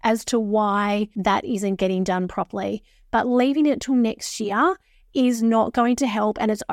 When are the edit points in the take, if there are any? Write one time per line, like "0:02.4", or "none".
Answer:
0:01.1